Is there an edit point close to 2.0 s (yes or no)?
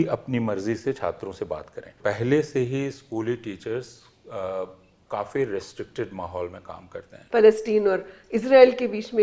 yes